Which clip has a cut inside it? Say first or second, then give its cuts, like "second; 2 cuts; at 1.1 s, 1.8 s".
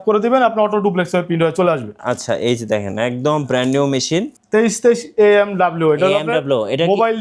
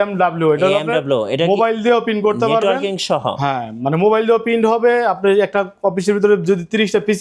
first; 1 cut; at 4.4 s